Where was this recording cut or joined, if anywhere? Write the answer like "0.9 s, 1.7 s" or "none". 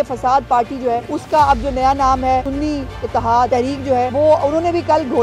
1.1 s, 2.5 s, 3.8 s